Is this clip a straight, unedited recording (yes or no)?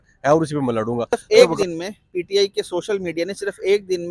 no